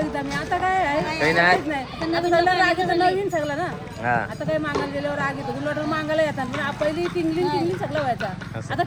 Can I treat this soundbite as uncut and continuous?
yes; 0 cuts

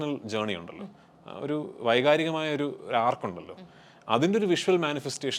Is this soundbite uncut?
yes; 0 cuts

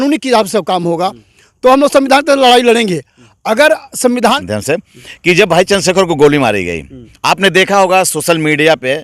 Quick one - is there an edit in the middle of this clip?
yes; 1 cut; at 4.4 s

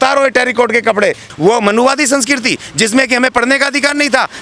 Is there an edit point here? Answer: yes; 1 cut; at 1.2 s

